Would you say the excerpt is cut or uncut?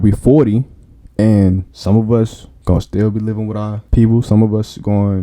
cut